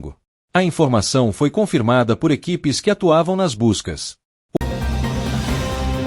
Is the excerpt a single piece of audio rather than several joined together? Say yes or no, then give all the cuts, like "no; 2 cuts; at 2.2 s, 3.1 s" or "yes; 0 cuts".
no; 1 cut; at 4.6 s